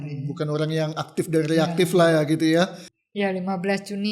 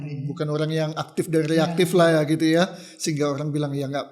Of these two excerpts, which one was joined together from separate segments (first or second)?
first